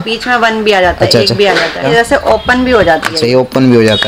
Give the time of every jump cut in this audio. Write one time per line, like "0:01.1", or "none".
0:01.8